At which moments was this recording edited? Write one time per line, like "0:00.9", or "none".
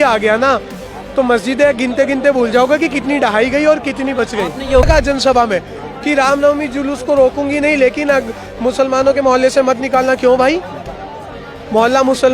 0:04.8